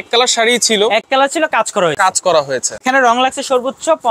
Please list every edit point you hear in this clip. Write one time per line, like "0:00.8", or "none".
0:02.8